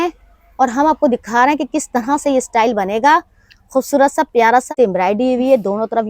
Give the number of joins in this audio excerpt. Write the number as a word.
one